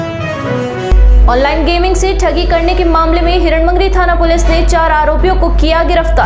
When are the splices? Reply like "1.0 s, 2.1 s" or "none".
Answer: 0.9 s